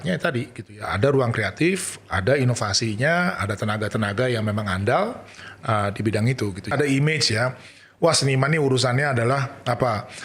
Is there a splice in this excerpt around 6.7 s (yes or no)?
yes